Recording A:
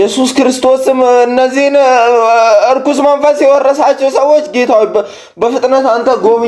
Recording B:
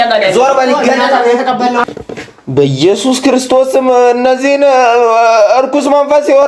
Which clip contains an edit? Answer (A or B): B